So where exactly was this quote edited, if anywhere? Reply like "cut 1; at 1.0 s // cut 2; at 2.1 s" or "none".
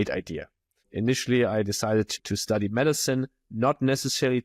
cut 1; at 0.9 s // cut 2; at 2.1 s